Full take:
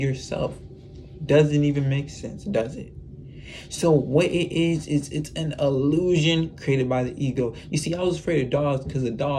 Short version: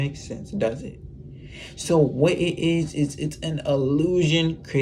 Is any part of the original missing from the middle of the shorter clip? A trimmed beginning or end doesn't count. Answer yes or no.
no